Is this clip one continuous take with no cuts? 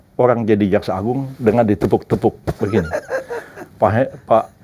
yes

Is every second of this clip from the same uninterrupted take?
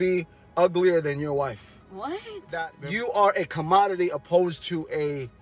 no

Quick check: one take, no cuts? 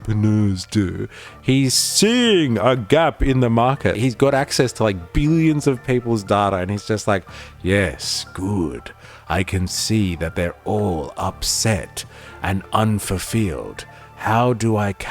no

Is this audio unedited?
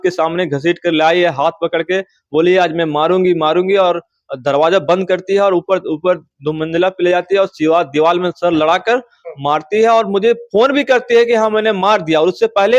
yes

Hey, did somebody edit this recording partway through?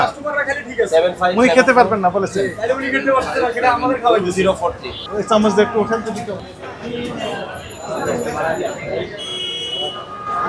yes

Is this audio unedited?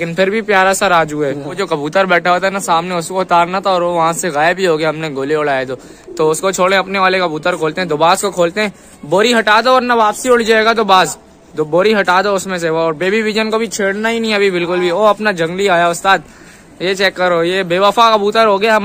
yes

